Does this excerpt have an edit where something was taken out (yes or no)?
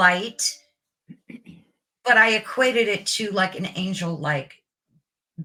no